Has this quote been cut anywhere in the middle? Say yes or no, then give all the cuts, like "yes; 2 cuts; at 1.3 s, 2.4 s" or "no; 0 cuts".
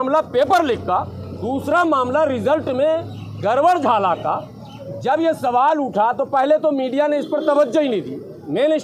no; 0 cuts